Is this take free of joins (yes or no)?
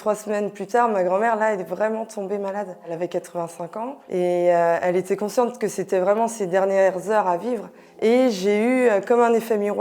yes